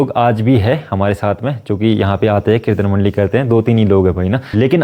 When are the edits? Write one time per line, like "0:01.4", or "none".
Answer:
none